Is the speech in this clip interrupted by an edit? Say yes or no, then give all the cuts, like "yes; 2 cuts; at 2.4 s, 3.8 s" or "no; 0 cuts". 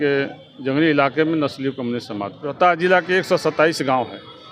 yes; 1 cut; at 2.4 s